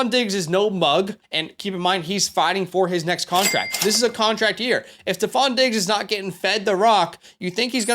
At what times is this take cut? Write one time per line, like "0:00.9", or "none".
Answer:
0:01.2